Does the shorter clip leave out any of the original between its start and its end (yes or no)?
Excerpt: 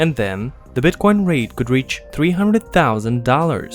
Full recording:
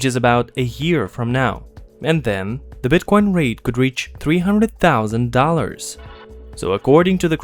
no